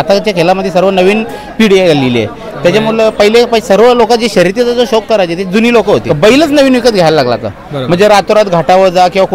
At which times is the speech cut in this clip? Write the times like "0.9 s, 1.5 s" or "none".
6.1 s